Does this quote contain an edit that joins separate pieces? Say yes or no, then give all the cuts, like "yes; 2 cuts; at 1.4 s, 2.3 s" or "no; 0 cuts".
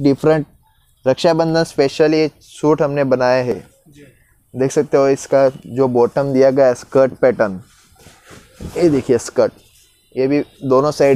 no; 0 cuts